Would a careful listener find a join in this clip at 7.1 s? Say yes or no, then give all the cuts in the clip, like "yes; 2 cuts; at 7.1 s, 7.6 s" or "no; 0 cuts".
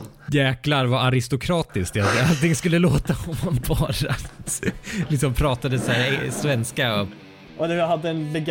yes; 1 cut; at 7.1 s